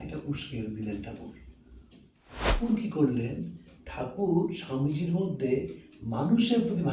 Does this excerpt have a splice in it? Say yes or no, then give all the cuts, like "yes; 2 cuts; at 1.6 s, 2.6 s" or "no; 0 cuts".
yes; 1 cut; at 2.5 s